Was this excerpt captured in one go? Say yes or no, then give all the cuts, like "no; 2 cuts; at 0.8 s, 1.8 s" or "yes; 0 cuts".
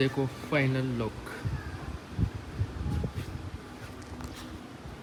yes; 0 cuts